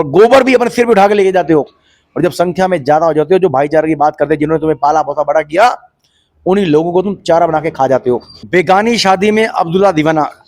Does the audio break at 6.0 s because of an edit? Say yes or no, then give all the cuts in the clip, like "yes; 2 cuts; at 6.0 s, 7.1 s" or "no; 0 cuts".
no; 1 cut; at 8.3 s